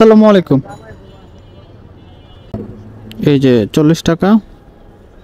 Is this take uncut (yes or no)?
no